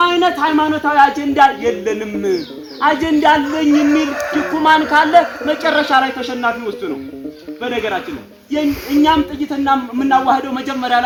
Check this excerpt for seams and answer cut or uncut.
uncut